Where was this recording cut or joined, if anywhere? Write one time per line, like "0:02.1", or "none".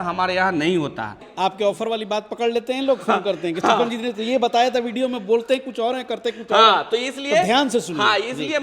0:01.2